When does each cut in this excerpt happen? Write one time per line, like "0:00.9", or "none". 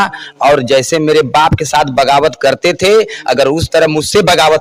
none